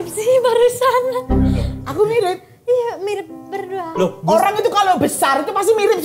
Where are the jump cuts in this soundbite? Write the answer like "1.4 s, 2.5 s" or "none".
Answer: none